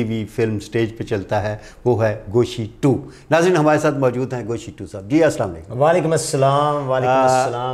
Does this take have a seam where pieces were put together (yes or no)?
no